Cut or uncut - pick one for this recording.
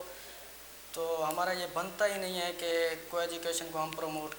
uncut